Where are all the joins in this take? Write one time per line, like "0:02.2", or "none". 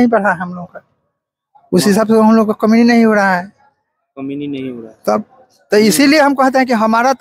none